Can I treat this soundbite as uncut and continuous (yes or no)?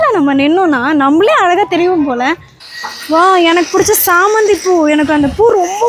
no